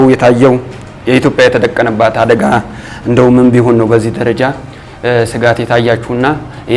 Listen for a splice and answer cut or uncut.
uncut